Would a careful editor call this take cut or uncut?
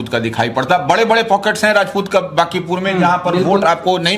uncut